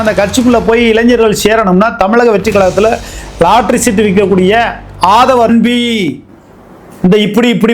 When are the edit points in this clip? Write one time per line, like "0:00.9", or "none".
0:05.5